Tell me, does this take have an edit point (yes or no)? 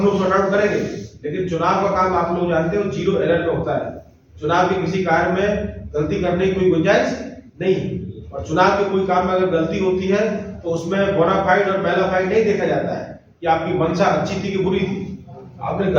no